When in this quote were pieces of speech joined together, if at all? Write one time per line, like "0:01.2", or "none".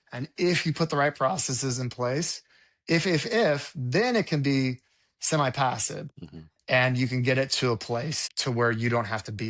0:08.3